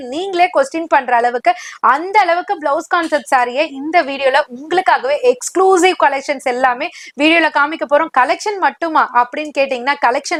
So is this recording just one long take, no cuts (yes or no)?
yes